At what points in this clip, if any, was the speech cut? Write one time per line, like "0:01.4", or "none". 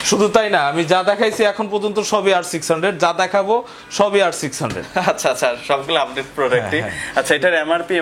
none